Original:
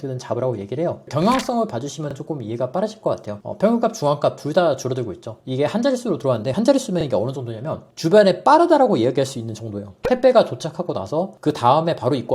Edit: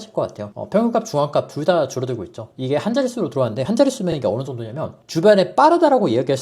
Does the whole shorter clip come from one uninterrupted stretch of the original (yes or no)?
yes